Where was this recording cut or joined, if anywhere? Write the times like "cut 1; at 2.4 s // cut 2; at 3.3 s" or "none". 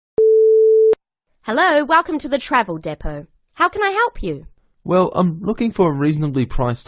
cut 1; at 0.9 s